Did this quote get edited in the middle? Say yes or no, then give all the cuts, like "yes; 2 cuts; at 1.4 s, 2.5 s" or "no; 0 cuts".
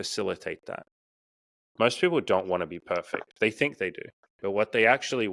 yes; 2 cuts; at 1.0 s, 4.3 s